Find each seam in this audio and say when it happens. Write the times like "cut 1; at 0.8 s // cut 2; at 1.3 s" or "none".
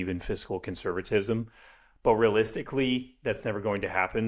none